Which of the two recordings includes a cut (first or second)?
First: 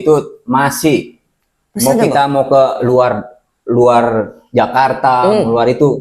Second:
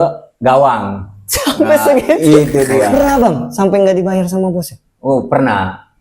second